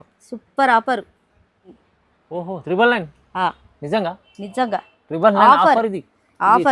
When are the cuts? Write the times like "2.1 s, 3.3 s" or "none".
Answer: 1.9 s